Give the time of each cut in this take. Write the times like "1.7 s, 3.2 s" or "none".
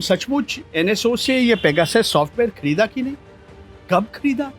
none